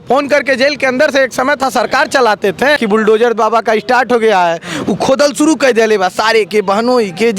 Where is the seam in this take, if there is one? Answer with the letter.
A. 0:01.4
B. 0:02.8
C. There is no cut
B